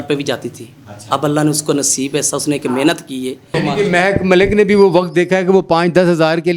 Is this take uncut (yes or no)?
no